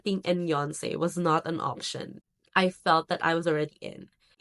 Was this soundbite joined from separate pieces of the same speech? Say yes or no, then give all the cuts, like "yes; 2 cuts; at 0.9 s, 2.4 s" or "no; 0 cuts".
no; 0 cuts